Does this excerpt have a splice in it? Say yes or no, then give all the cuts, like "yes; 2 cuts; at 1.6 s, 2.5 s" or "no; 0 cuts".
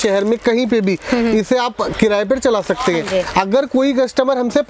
no; 0 cuts